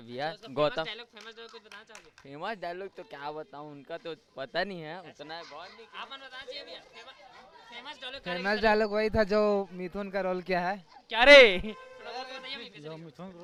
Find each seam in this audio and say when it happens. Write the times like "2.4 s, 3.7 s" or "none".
none